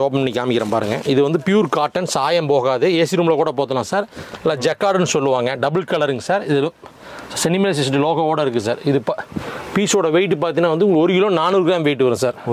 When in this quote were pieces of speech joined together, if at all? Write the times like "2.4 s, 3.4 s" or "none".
none